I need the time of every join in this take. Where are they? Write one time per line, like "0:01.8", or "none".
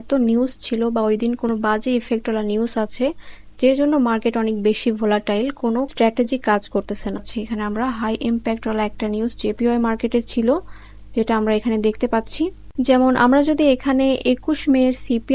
0:07.2
0:12.7